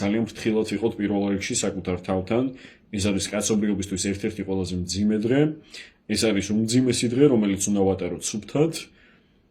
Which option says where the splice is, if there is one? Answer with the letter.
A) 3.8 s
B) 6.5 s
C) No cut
C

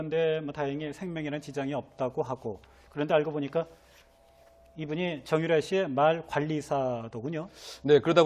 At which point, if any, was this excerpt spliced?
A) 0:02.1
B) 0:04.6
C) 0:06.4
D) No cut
A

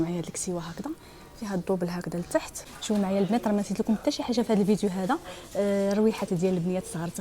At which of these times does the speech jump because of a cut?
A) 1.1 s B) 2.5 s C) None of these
B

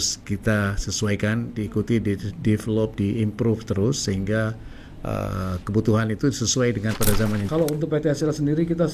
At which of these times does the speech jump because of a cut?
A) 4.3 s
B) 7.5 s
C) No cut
B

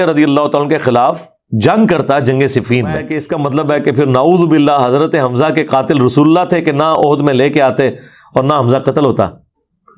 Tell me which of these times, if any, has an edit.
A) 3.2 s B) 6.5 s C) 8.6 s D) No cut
A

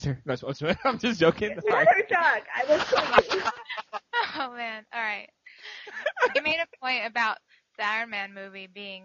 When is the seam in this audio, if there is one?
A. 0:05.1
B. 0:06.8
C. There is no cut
C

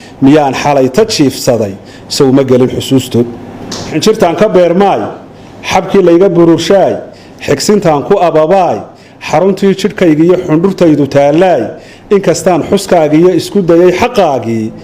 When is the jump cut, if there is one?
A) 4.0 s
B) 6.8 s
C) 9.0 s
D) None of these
A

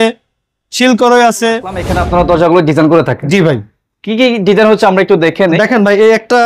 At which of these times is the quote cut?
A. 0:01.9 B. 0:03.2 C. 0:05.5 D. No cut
A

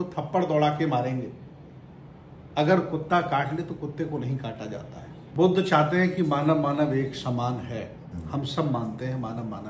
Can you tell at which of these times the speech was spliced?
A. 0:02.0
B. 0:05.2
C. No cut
B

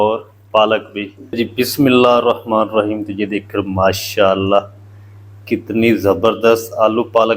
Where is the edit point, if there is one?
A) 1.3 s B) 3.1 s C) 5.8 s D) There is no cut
A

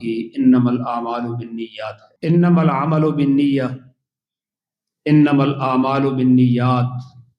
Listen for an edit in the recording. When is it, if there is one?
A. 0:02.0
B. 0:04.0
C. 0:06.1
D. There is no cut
A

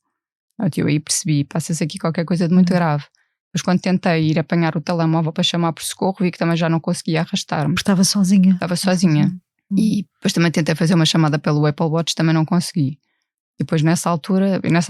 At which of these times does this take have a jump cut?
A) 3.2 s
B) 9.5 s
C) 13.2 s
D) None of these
B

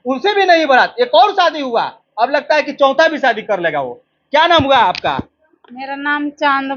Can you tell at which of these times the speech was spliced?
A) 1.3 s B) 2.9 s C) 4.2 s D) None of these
D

